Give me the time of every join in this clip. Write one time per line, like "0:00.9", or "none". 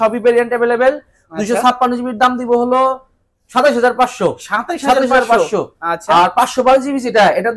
none